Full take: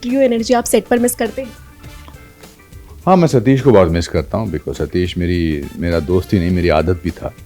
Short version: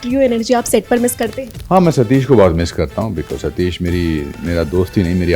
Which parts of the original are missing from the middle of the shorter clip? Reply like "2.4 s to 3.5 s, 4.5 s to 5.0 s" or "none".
1.5 s to 2.8 s